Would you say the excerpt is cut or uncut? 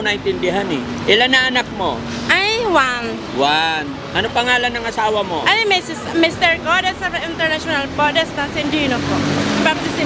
uncut